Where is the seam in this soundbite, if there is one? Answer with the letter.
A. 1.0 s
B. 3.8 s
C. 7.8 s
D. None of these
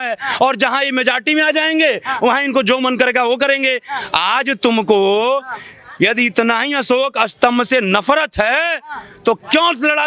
D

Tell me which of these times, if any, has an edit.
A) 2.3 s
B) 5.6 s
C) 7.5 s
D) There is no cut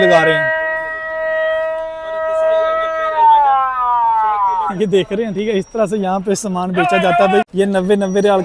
C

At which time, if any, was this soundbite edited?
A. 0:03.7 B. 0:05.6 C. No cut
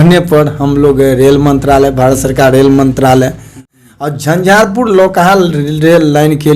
A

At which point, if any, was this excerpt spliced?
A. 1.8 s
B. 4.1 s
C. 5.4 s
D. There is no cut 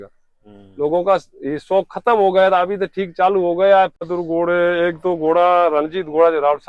B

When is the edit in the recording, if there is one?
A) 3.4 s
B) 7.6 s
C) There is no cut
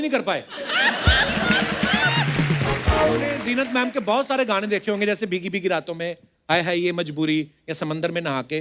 A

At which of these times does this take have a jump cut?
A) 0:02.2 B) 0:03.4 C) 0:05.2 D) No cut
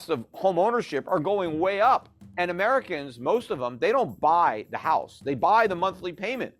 A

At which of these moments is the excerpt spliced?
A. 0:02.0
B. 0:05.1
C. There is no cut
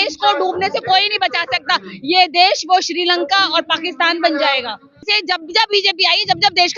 B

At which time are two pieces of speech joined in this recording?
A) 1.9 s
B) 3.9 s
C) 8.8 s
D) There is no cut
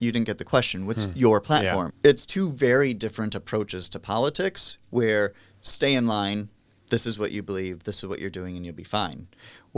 A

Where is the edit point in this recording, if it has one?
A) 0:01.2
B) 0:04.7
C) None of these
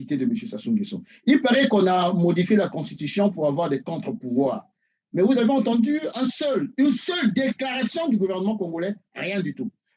C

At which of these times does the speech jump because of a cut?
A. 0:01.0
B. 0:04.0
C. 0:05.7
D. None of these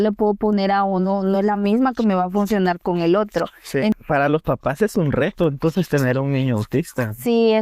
B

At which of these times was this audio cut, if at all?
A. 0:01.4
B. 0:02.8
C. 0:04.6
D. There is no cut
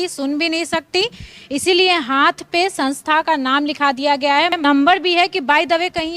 C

